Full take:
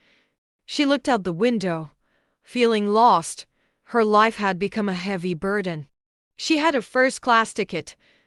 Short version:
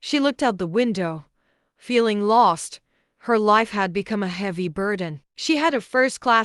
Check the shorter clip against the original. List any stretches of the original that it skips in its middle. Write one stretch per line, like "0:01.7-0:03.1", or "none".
0:05.9-0:06.3